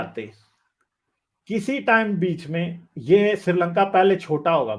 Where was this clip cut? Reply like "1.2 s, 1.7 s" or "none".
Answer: none